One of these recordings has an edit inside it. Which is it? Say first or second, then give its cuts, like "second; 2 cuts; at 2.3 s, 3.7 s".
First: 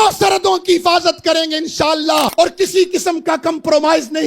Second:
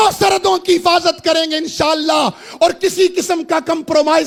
first; 1 cut; at 2.3 s